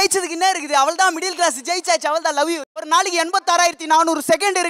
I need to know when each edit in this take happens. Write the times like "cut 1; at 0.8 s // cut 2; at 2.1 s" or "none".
cut 1; at 2.8 s